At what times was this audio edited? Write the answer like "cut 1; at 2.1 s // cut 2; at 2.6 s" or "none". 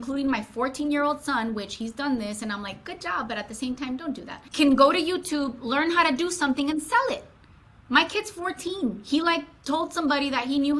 cut 1; at 4.4 s